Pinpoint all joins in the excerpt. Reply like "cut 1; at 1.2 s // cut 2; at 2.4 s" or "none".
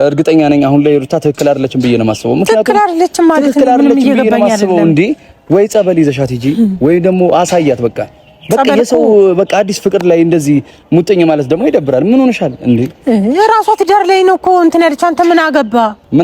none